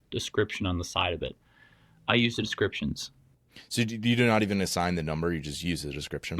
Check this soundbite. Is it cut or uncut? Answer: cut